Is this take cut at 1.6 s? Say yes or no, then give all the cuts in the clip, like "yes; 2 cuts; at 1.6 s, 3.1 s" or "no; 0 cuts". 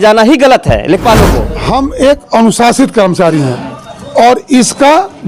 yes; 1 cut; at 1.6 s